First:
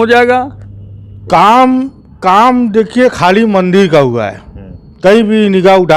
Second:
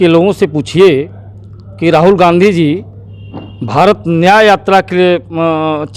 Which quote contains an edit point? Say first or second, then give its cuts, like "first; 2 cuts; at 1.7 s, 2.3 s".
first; 1 cut; at 1.2 s